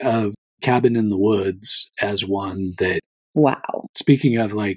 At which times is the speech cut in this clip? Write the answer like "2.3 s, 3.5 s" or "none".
3.2 s, 3.9 s